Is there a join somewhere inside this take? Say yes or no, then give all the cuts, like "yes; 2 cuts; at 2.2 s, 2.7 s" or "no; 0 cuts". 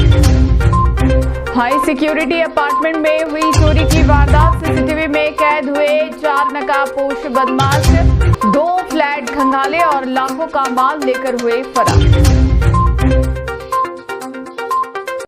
yes; 1 cut; at 1.1 s